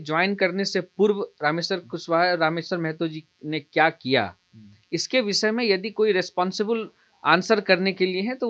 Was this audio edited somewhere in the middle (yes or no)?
no